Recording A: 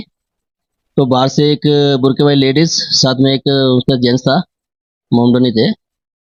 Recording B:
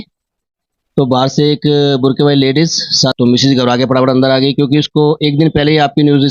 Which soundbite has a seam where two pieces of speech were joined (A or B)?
B